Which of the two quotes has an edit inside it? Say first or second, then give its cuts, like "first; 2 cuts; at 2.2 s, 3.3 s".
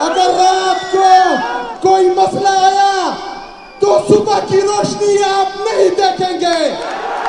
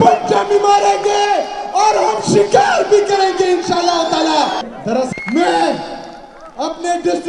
second; 1 cut; at 5.1 s